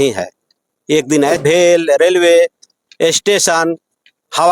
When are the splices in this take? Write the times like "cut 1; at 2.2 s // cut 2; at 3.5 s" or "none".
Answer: cut 1; at 1.4 s